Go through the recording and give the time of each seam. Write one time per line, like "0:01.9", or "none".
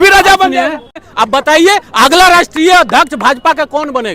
0:01.1